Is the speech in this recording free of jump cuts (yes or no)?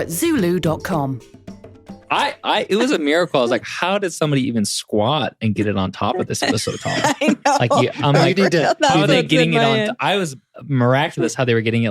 no